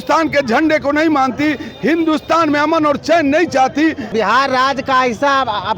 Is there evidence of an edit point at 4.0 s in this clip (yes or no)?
yes